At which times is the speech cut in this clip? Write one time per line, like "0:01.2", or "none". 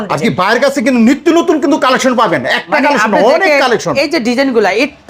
none

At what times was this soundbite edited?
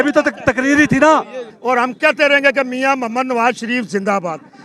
0:01.5

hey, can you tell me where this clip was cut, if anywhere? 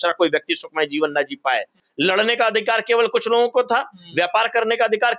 0:01.8

